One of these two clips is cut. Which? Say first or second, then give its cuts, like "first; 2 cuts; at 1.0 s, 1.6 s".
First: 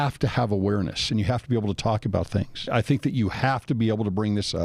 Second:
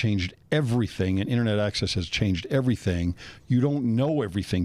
first; 2 cuts; at 1.0 s, 2.7 s